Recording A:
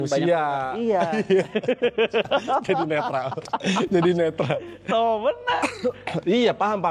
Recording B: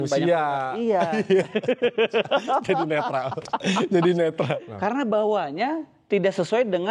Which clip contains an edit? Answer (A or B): B